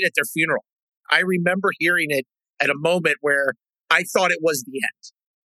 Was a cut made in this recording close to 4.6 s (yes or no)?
no